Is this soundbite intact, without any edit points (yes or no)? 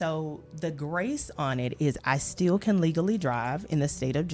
yes